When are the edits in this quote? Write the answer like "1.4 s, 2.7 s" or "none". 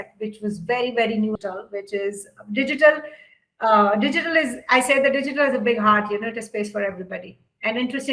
1.3 s